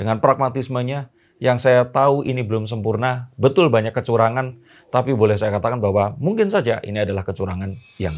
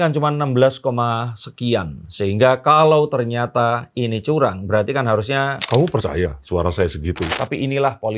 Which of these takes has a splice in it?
second; 1 cut; at 7.3 s

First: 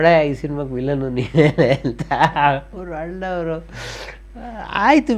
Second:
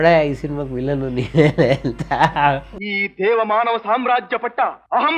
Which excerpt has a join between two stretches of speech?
second; 1 cut; at 2.8 s

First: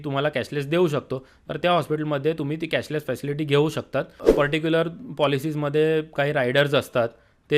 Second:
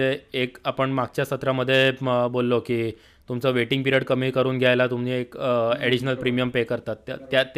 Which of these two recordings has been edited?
first; 1 cut; at 4.2 s

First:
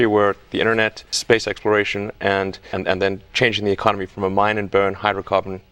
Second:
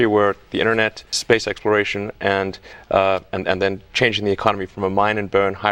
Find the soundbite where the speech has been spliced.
first; 1 cut; at 2.7 s

